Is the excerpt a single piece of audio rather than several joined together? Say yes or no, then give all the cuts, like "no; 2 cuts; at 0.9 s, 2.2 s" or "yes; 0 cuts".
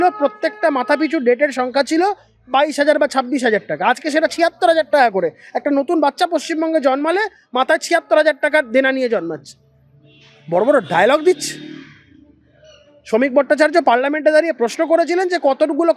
yes; 0 cuts